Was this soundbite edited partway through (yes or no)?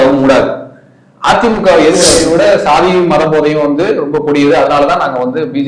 yes